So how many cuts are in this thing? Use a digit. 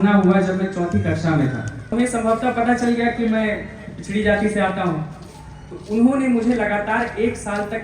1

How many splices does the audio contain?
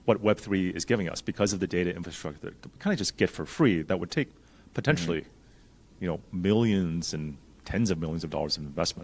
0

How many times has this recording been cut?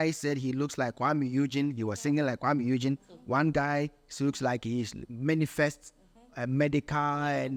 0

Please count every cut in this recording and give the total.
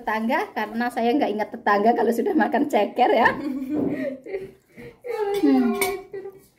0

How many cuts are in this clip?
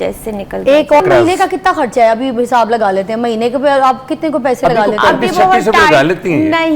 1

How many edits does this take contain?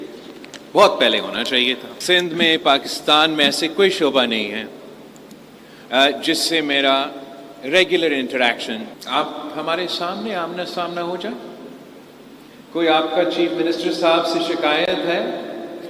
2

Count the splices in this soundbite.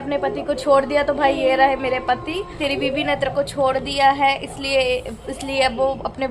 1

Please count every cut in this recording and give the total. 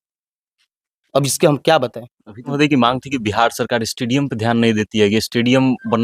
1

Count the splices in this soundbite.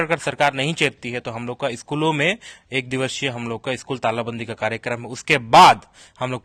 0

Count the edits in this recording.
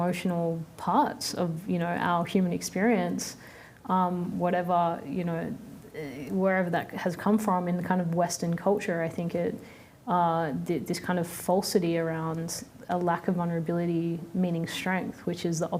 0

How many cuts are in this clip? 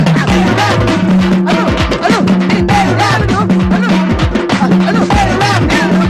1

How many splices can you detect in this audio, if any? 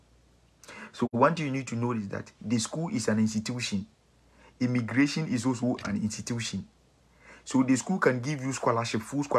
0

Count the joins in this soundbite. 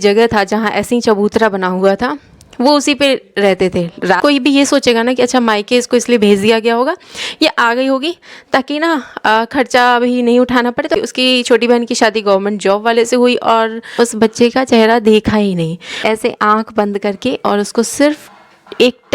4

